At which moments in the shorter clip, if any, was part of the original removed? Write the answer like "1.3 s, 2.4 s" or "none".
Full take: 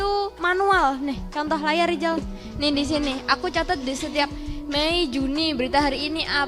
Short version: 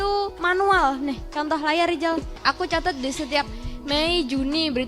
2.4 s